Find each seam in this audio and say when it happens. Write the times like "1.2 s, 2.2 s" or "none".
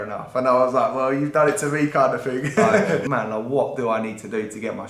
3.0 s